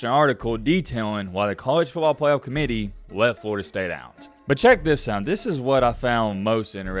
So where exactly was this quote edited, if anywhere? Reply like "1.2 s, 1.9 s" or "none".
4.3 s